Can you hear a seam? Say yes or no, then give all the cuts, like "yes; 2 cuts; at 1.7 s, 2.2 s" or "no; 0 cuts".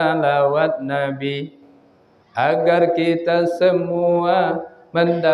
no; 0 cuts